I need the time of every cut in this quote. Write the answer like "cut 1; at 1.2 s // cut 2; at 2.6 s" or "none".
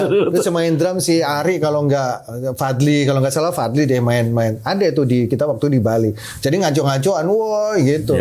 none